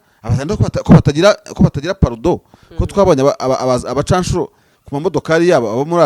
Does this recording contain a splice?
no; 0 cuts

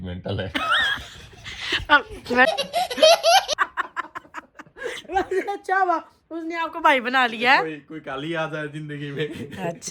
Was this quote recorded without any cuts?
no; 2 cuts; at 2.5 s, 3.8 s

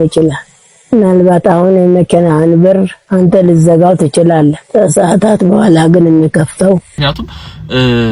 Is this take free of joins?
no; 1 cut; at 6.9 s

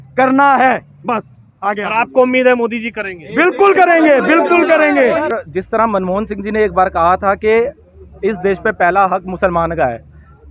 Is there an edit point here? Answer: yes; 1 cut; at 5.3 s

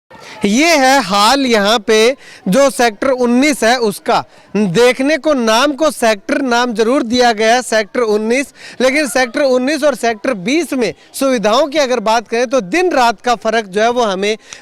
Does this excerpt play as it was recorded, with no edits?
yes; 0 cuts

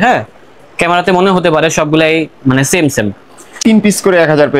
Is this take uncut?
no; 1 cut; at 3.6 s

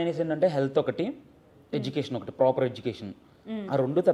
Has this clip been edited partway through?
no; 0 cuts

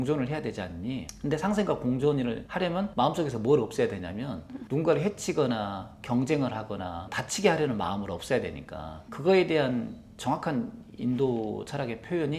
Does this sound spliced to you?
no; 0 cuts

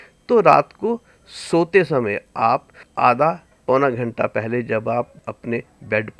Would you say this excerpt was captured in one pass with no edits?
no; 3 cuts; at 2.8 s, 3.5 s, 5.2 s

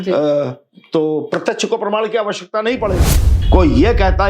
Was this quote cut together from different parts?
yes; 1 cut; at 3.3 s

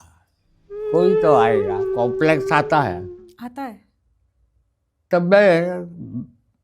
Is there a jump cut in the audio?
yes; 1 cut; at 1.8 s

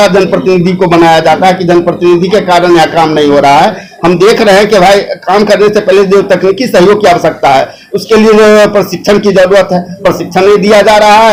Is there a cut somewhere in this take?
no; 0 cuts

